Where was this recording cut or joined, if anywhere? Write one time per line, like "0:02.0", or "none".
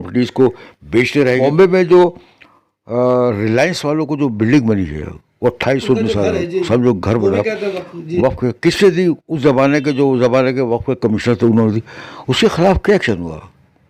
0:01.3